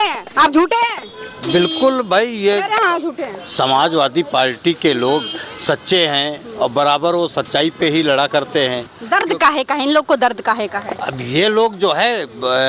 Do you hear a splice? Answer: yes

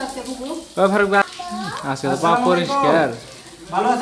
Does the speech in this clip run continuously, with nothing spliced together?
no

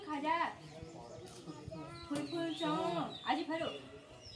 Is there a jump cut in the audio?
no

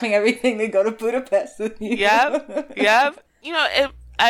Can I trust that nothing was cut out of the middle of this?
no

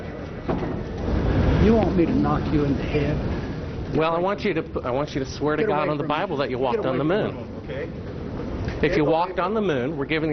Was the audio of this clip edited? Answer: yes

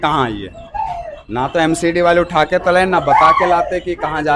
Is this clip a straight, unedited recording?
yes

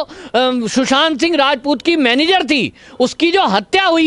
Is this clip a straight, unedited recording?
yes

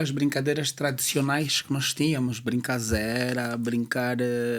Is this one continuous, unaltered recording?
yes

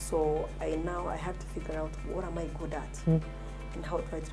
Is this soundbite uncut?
yes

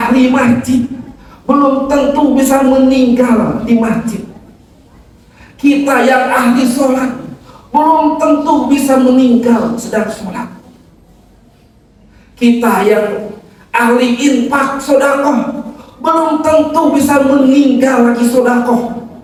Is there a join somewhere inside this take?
no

